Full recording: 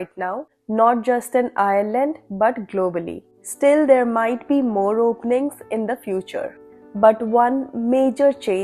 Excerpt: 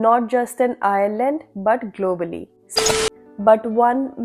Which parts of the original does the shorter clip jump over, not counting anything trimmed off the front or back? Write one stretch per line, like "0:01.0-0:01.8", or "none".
0:03.6-0:06.4